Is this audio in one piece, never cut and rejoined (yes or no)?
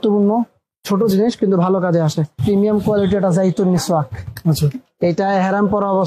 no